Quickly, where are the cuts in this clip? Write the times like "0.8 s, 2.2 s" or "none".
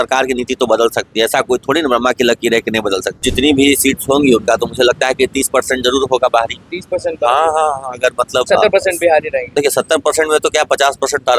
3.2 s, 8.5 s, 9.4 s